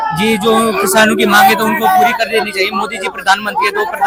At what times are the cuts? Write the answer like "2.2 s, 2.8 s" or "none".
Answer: none